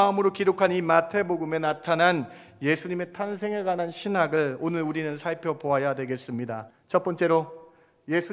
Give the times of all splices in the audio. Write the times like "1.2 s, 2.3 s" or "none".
6.7 s